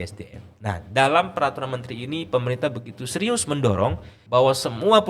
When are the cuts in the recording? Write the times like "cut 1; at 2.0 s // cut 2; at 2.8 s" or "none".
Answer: cut 1; at 4.1 s